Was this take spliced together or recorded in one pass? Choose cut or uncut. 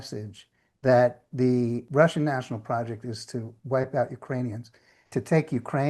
cut